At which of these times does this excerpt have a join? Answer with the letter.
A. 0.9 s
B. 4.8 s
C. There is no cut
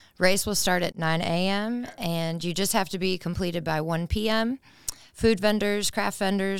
A